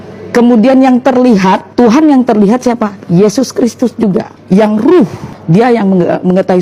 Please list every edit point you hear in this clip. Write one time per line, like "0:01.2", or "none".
0:01.7
0:04.3
0:05.3